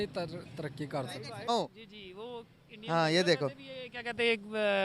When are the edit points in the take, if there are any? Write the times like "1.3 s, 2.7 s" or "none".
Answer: 1.5 s